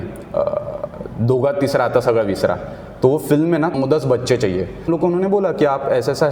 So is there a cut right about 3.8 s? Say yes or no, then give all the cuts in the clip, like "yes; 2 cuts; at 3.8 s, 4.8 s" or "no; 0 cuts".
yes; 2 cuts; at 3.8 s, 4.9 s